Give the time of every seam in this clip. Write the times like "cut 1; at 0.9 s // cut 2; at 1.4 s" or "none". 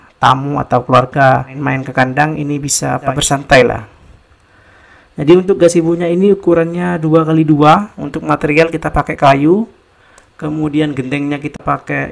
cut 1; at 1.5 s // cut 2; at 3.1 s